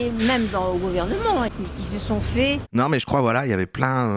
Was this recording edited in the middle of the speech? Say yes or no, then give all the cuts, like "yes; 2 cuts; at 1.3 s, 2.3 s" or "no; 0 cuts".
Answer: no; 0 cuts